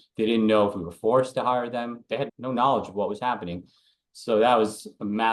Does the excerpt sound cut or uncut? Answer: uncut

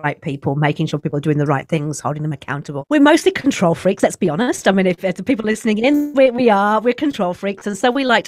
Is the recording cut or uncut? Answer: cut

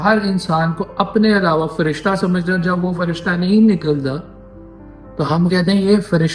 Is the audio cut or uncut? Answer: uncut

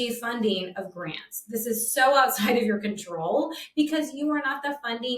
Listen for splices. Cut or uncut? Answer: uncut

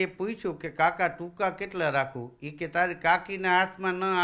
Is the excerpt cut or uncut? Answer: uncut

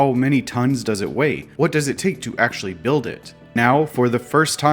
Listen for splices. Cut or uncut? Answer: cut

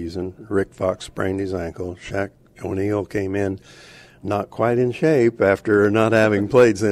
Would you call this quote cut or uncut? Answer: uncut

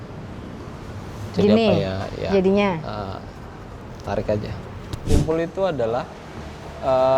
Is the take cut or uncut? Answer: cut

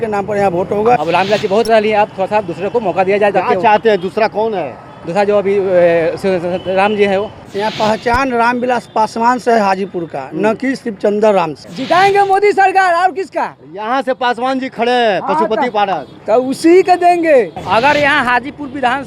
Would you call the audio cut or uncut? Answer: cut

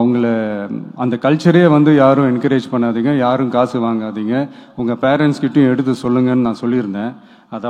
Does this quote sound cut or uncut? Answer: uncut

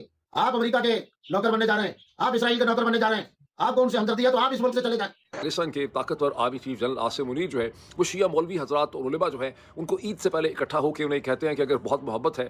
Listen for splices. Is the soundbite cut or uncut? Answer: uncut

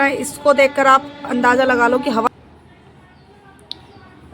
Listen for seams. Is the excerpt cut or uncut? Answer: cut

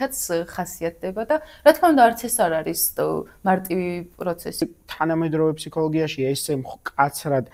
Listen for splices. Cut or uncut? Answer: cut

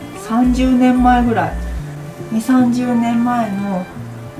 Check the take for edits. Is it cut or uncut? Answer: uncut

